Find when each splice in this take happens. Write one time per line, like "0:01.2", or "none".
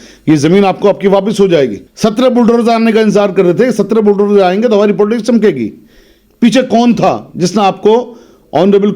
0:01.8

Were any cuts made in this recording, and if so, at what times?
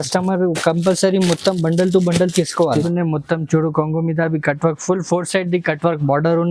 0:02.9

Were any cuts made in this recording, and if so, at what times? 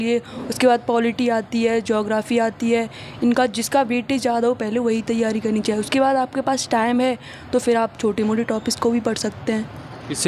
none

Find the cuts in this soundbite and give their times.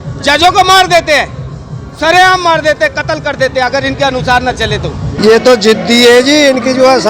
0:05.0

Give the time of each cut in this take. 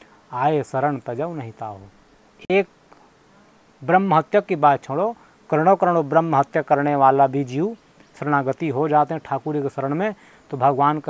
none

